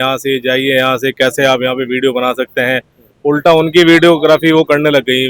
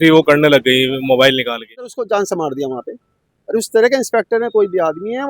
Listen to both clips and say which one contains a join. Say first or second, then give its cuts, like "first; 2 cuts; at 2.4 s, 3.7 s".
second; 1 cut; at 2.0 s